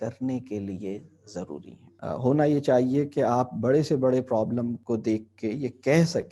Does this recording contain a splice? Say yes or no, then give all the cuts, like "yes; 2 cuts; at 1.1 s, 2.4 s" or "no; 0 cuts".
yes; 1 cut; at 2.0 s